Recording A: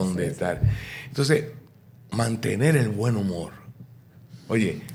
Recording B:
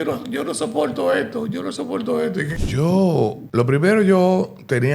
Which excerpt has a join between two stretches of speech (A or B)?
B